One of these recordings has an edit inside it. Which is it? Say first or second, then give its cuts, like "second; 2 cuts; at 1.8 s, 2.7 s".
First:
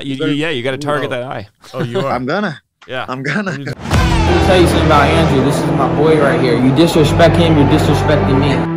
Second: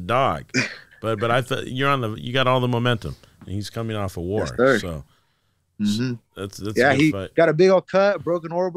first; 1 cut; at 3.7 s